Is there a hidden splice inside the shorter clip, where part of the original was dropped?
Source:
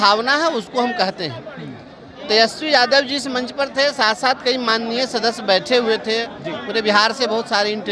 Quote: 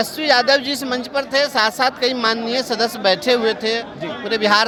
no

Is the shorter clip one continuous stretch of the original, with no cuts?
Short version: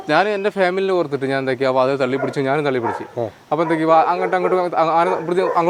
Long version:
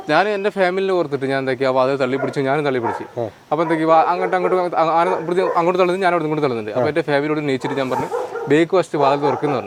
yes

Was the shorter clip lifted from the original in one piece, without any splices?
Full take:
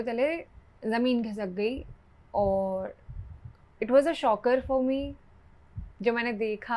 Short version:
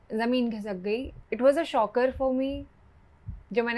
no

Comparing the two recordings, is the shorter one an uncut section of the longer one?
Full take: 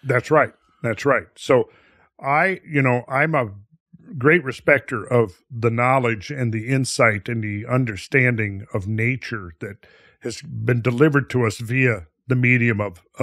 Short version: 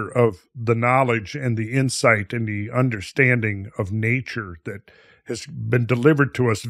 yes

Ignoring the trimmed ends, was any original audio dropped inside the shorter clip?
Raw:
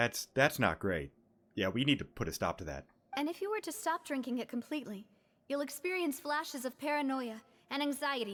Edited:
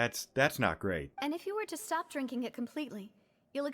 yes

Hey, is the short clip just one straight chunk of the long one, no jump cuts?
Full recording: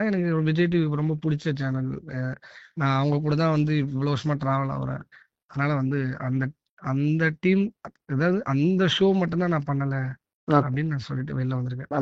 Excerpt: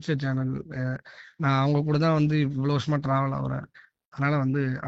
yes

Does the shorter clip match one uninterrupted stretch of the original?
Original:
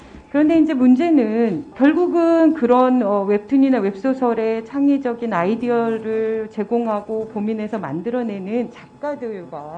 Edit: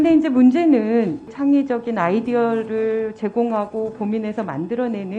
no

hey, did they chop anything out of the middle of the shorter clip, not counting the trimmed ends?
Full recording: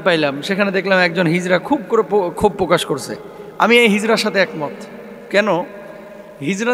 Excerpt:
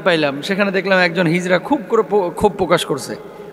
no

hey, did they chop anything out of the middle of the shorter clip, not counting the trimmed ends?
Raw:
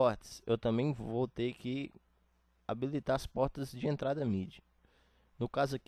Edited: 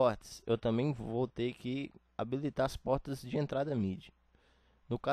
yes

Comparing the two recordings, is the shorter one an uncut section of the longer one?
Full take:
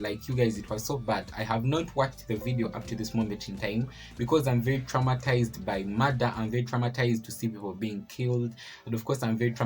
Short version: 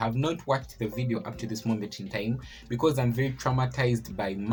yes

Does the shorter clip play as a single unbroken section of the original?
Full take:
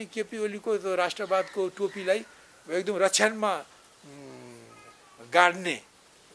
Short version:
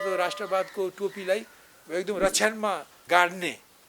no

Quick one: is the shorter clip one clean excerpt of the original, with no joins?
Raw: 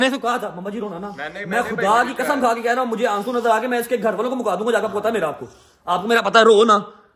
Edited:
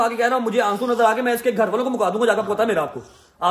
yes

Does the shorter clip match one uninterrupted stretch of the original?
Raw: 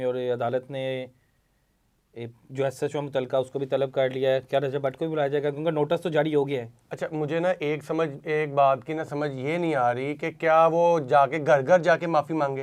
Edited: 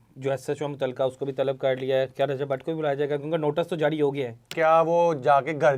no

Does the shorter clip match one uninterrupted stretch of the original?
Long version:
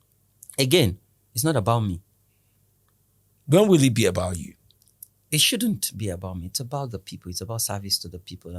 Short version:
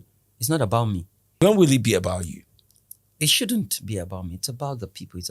no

